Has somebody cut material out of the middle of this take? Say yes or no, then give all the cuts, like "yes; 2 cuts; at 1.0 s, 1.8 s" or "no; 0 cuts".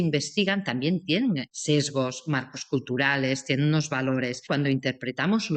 yes; 2 cuts; at 1.5 s, 4.4 s